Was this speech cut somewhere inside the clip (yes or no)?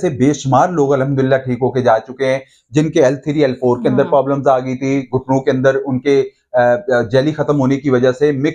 no